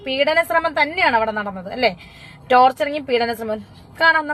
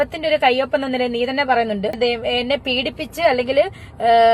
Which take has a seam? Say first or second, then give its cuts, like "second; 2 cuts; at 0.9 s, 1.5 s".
second; 1 cut; at 2.0 s